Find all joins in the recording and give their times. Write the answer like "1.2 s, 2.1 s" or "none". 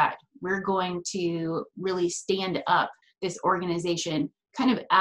3.0 s